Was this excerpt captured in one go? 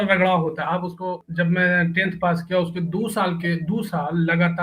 no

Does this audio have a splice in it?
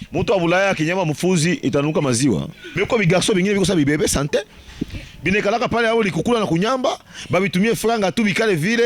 yes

